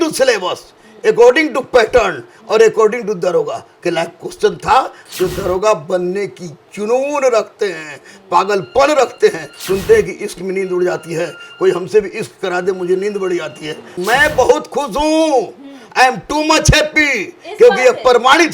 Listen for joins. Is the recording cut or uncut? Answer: cut